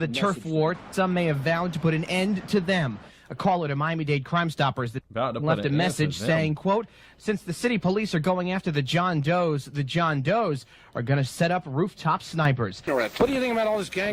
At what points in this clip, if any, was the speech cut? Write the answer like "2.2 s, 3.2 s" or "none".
12.8 s